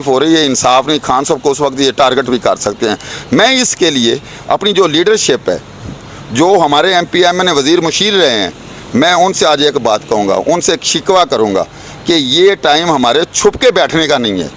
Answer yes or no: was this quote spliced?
no